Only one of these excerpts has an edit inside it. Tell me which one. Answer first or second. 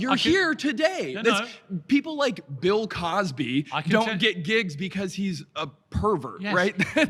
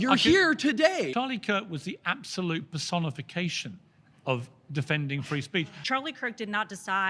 second